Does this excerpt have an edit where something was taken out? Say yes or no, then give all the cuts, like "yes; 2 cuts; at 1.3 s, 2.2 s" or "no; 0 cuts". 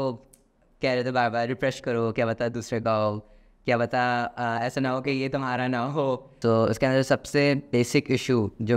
yes; 1 cut; at 6.3 s